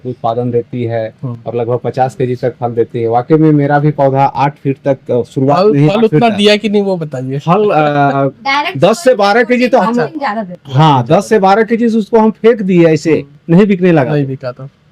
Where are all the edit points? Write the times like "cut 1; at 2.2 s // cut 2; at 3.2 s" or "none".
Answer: none